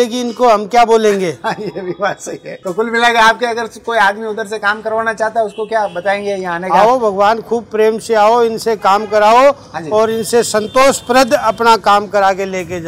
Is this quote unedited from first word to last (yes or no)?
no